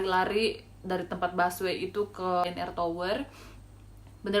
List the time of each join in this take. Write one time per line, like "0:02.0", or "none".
0:02.4